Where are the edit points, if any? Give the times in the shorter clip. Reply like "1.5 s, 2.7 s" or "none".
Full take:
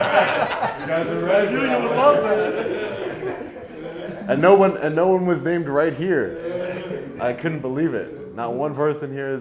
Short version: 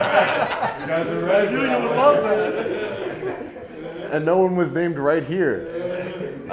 4.1 s